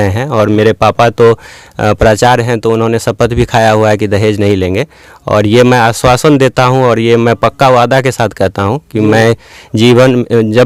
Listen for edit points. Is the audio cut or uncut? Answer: uncut